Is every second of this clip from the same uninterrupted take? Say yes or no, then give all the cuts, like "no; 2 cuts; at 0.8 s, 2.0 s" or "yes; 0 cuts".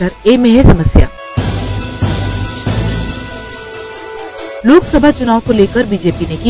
yes; 0 cuts